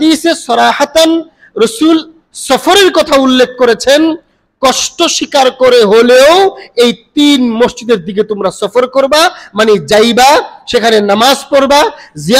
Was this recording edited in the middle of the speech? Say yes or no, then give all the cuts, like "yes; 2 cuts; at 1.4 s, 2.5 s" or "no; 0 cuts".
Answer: no; 0 cuts